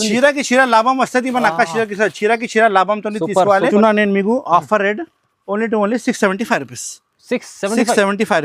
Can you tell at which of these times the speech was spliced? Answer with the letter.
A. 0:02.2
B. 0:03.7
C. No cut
B